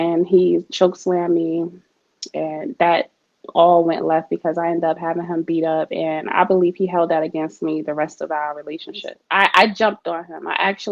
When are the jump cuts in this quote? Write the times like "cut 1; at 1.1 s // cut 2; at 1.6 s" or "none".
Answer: cut 1; at 9.2 s